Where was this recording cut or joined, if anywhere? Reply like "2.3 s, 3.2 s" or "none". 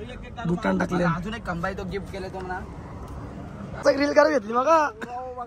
3.8 s